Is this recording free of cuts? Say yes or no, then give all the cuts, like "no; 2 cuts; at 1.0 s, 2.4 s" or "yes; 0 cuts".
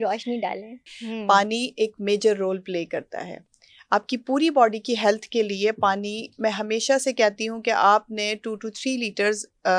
no; 1 cut; at 0.9 s